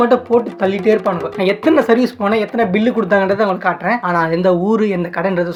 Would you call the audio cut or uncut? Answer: uncut